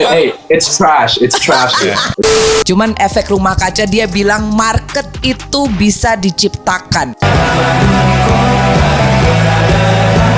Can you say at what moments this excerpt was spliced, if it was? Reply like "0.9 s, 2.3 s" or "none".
2.4 s